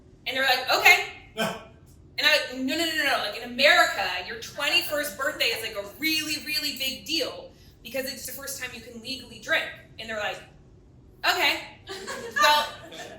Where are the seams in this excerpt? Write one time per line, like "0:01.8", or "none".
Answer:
0:08.3